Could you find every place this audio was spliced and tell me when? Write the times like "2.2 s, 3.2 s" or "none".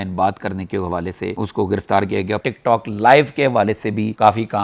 2.4 s